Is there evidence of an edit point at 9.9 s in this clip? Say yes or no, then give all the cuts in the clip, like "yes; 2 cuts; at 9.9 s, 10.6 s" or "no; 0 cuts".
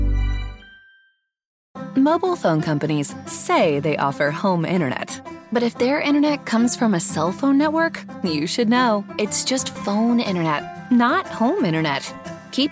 no; 1 cut; at 1.6 s